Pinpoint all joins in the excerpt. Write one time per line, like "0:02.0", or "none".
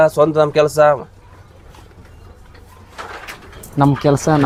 none